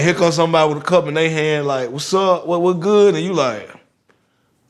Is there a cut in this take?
no; 0 cuts

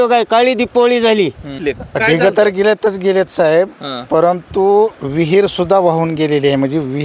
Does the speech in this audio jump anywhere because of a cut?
yes; 1 cut; at 1.7 s

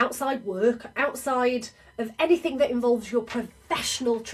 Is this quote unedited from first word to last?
yes; 0 cuts

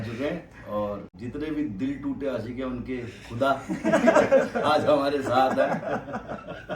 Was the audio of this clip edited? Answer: yes; 1 cut; at 1.1 s

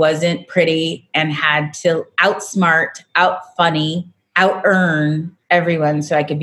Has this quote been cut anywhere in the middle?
yes; 2 cuts; at 4.2 s, 5.3 s

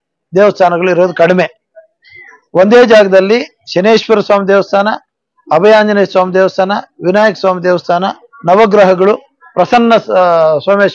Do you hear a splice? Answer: no; 0 cuts

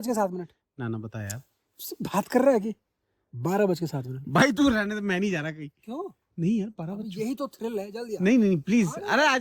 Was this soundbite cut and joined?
no; 0 cuts

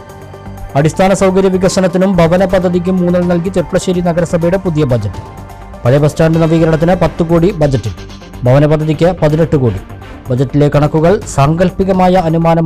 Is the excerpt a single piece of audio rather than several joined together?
yes; 0 cuts

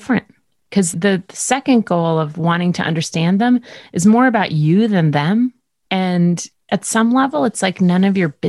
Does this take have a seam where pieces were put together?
yes; 2 cuts; at 5.7 s, 6.6 s

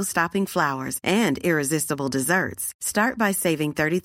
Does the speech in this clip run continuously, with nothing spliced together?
yes; 0 cuts

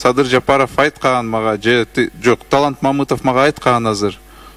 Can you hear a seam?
no; 0 cuts

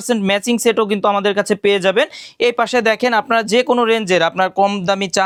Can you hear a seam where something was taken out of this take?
no; 0 cuts

